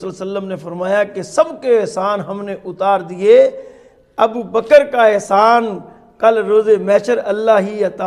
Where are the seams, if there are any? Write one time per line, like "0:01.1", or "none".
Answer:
none